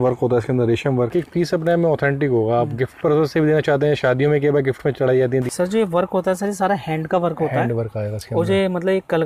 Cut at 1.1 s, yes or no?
yes